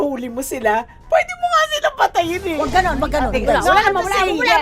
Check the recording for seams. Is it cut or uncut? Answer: cut